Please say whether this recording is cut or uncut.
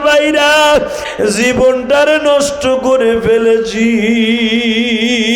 cut